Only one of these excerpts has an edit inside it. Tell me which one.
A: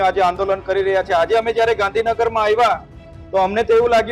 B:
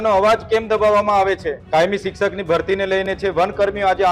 B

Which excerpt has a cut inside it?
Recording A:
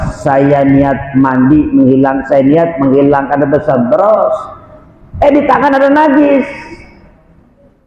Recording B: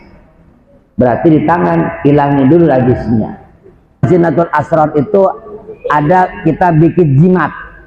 B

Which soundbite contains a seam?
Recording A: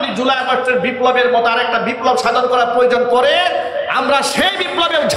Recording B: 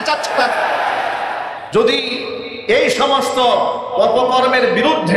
B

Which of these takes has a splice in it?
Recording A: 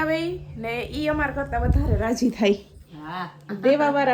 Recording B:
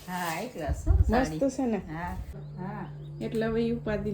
B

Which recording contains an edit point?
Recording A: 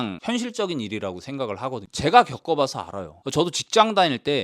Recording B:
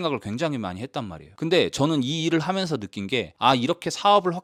A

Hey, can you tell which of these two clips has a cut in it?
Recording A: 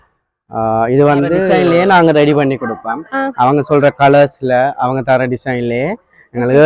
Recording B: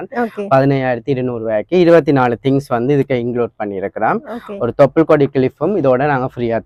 A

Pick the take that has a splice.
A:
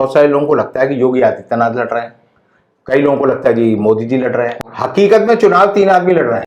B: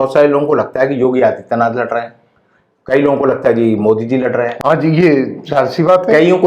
A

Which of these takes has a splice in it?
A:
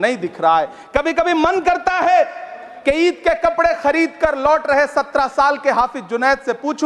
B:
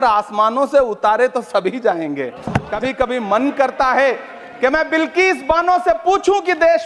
B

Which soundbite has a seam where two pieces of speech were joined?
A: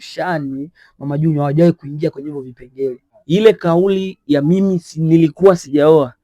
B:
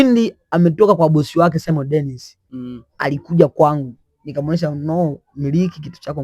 A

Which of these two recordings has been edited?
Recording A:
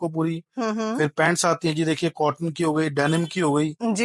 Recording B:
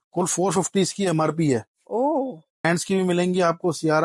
B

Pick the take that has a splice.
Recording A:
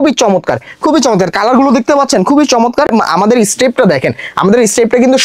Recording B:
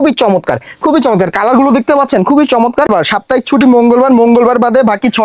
B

